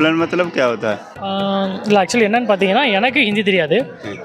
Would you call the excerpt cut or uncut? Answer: cut